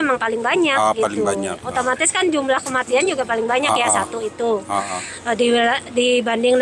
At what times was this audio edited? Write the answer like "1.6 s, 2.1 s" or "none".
none